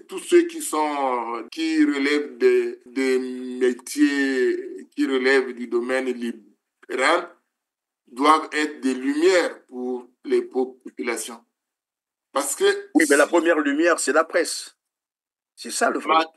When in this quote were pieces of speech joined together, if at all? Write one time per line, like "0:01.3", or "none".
0:01.4
0:02.8